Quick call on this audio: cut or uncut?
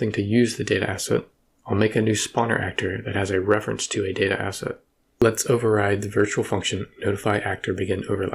cut